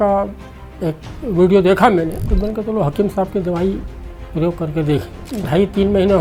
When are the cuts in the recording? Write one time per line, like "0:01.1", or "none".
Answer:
0:02.2
0:05.2

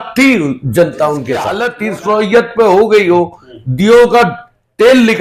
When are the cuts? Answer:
0:01.7

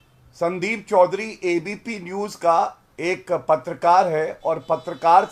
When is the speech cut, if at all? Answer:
none

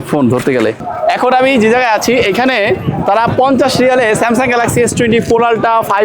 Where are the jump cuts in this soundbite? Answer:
0:00.9

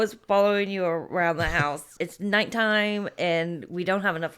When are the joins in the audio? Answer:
0:01.9

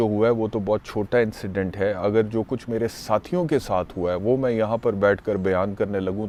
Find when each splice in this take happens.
none

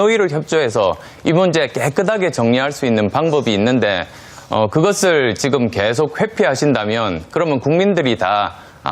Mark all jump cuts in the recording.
0:07.3

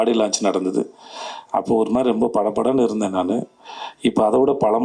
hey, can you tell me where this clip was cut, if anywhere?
none

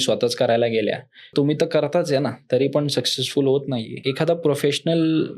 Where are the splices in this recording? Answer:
0:01.3
0:04.0

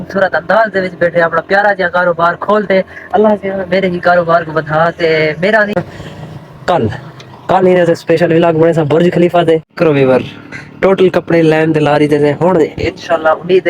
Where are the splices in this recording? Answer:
0:05.8
0:09.7

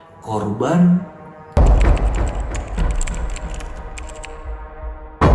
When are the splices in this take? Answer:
0:01.6

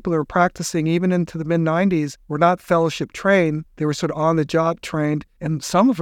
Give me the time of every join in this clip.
0:02.2
0:03.7

